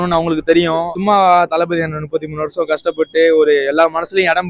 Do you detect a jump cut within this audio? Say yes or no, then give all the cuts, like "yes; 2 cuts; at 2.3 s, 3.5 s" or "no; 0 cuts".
yes; 1 cut; at 0.9 s